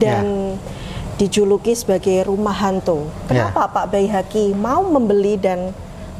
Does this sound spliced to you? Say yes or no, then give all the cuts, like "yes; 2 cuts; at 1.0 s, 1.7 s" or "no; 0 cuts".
no; 0 cuts